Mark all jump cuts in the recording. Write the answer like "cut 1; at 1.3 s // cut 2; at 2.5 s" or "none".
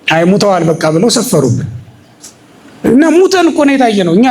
none